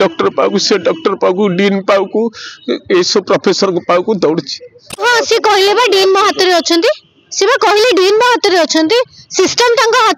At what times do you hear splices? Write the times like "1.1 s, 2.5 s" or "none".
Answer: 5.0 s